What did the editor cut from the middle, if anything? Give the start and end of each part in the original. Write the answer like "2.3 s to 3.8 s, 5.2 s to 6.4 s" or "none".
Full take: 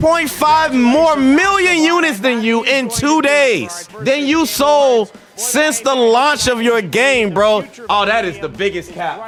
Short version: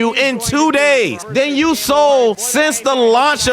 3.7 s to 3.9 s, 5.1 s to 5.4 s

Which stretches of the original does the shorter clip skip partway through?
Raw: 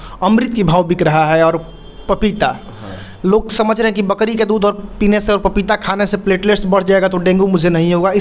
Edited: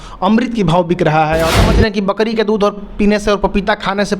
1.6 s to 3.6 s

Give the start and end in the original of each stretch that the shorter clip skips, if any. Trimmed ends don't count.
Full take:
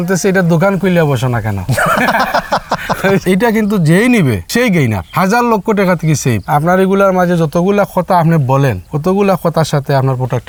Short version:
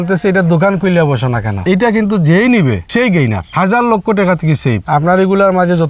1.6 s to 3.2 s

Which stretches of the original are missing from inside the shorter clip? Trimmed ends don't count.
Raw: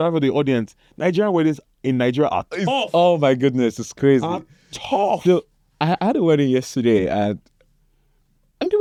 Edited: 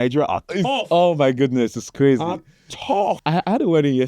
5.2 s to 5.7 s

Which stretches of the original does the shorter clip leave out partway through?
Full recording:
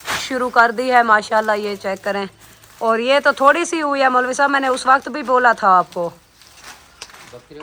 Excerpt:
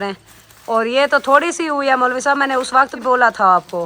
5.1 s to 5.2 s

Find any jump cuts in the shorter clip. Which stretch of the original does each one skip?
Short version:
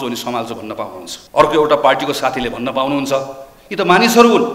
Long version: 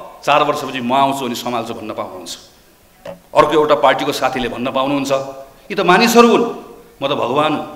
2.3 s to 3.1 s

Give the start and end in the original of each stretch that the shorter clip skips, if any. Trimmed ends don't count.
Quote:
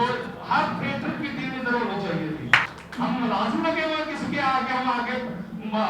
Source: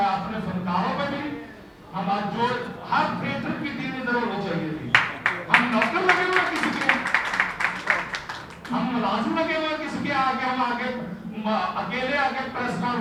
5.1 s to 8.5 s

